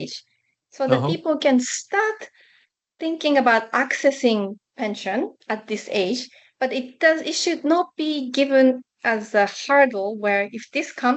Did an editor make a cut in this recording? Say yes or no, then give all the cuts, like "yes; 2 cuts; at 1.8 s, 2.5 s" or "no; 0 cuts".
no; 0 cuts